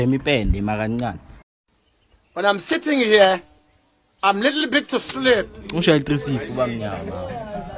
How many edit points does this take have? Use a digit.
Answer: 1